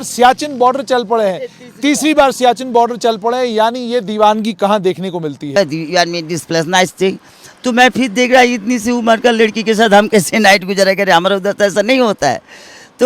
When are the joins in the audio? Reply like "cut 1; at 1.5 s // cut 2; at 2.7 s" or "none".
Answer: cut 1; at 5.6 s